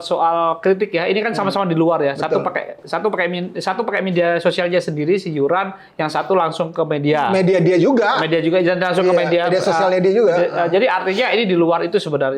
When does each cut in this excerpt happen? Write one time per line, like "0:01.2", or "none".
none